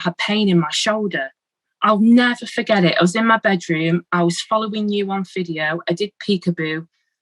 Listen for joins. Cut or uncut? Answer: cut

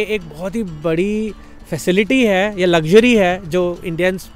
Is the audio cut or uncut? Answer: uncut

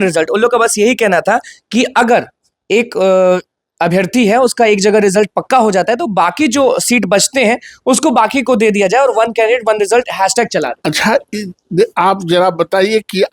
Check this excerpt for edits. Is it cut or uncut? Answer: cut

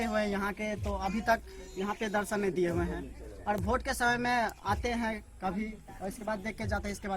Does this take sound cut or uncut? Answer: uncut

